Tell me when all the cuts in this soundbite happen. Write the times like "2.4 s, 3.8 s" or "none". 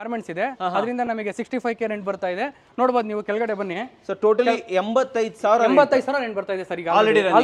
none

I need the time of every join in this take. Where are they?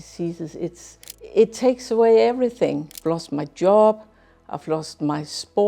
1.1 s, 2.9 s

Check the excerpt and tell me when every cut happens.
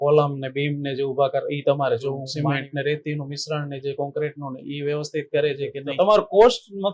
2.3 s, 5.8 s

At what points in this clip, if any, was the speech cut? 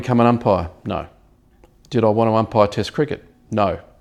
none

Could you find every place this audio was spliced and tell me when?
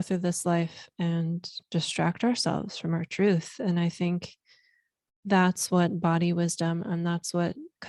none

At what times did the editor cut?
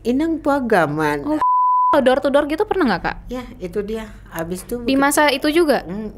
1.4 s

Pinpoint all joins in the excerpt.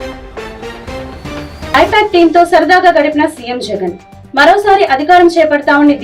1.4 s

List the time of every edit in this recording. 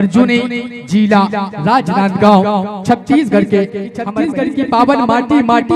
4.0 s

